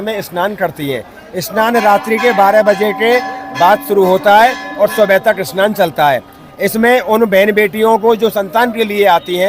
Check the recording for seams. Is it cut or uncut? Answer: uncut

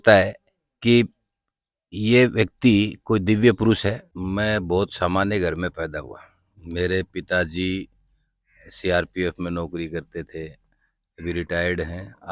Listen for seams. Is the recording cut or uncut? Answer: cut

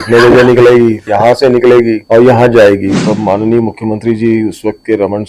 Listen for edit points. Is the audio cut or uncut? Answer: cut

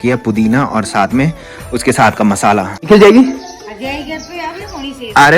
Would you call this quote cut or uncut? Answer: cut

